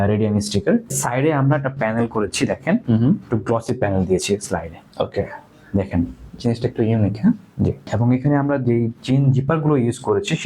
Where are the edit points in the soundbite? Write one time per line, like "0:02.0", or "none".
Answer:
0:00.9
0:07.9